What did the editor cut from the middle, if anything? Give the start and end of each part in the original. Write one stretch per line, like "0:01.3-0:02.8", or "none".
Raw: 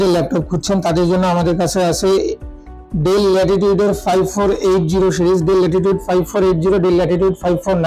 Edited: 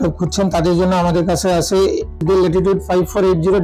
0:02.5-0:05.4